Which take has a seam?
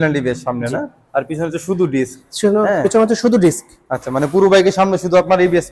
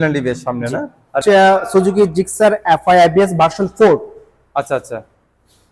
second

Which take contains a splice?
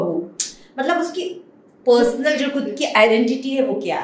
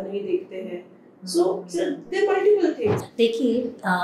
second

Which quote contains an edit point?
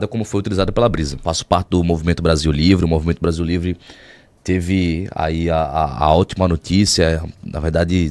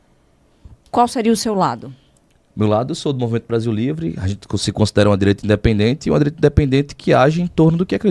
first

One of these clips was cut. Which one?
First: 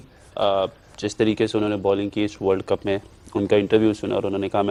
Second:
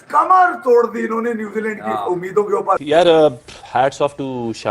second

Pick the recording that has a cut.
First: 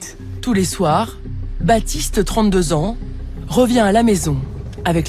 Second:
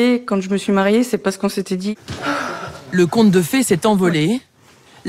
second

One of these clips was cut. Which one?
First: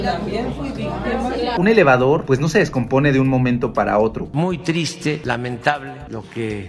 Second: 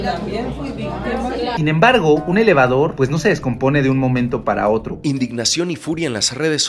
first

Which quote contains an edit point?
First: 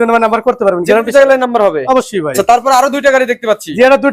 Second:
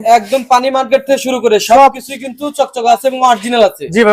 first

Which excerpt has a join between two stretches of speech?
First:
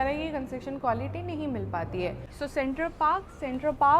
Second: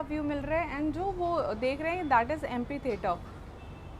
first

